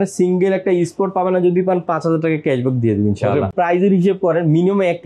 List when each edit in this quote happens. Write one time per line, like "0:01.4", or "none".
0:03.5